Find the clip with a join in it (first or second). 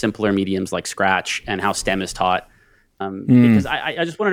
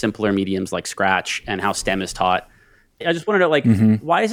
second